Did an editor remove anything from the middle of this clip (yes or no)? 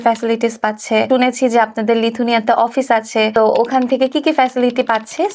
yes